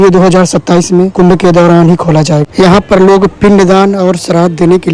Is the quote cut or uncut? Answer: cut